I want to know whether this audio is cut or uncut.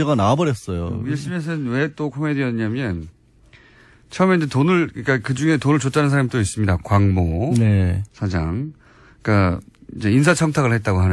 cut